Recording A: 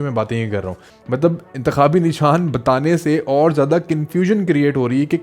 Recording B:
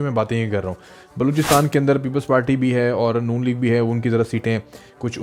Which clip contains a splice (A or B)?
A